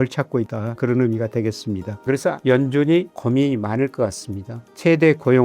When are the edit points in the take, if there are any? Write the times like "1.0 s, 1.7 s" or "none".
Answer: 1.9 s